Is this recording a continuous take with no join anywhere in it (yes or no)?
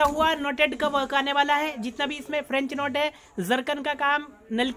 yes